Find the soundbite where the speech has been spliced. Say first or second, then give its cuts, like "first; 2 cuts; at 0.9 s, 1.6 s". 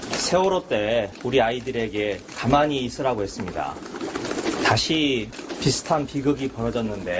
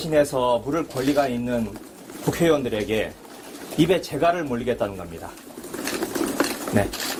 first; 4 cuts; at 1.2 s, 2.3 s, 3.8 s, 5.4 s